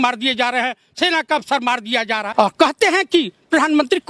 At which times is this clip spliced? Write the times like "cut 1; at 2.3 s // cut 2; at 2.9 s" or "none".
cut 1; at 2.3 s